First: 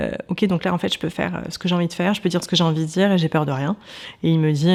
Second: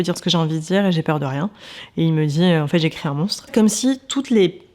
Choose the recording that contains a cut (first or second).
second